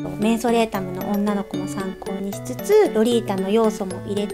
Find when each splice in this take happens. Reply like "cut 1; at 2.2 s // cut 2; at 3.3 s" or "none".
cut 1; at 2.9 s